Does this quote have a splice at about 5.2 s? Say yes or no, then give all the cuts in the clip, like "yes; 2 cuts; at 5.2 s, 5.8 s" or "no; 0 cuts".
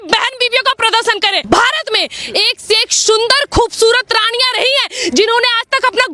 no; 1 cut; at 1.4 s